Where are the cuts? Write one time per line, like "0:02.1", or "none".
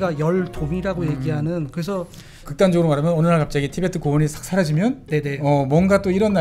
0:02.5